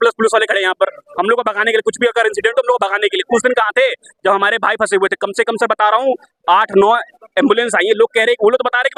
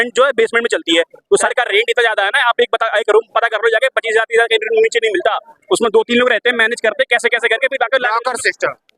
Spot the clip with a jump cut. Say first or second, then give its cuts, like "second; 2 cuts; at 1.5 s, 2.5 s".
second; 1 cut; at 1.5 s